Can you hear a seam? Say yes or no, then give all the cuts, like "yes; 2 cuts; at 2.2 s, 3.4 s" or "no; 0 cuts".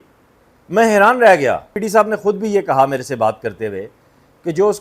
yes; 1 cut; at 1.8 s